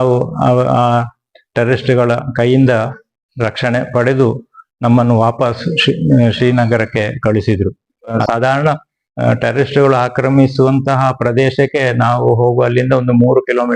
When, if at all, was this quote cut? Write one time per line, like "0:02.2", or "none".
0:08.2